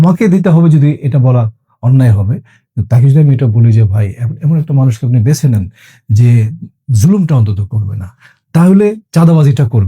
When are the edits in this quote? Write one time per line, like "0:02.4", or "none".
none